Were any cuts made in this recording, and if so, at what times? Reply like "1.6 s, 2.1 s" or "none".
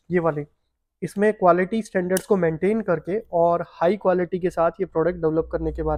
none